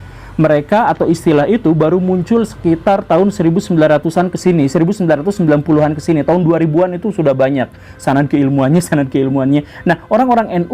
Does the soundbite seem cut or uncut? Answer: uncut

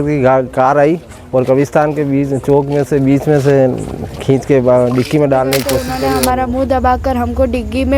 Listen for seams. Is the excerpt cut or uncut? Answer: cut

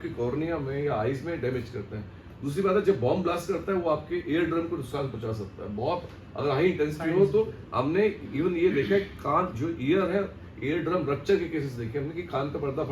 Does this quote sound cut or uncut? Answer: uncut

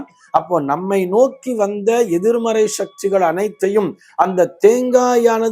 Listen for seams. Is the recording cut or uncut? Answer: uncut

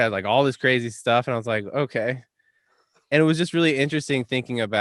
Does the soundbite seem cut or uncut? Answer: uncut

